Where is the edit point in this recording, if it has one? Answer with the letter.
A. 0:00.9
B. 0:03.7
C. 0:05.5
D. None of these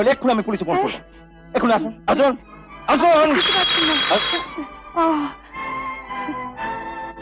D